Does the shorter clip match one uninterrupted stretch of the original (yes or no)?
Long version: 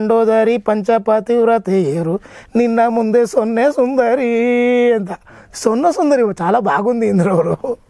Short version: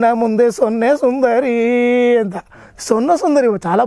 yes